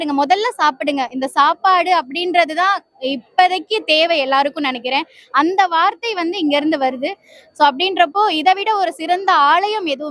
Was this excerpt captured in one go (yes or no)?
yes